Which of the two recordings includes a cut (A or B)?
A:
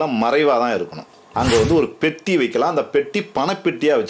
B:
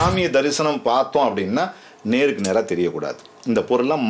A